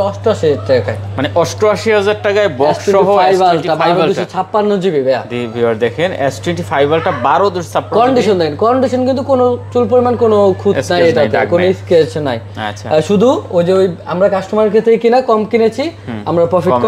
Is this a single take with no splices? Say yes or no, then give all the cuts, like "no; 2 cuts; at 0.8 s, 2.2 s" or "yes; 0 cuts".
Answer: yes; 0 cuts